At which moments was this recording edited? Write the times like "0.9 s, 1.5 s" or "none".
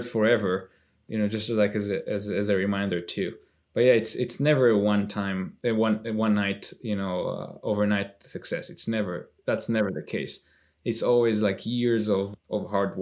none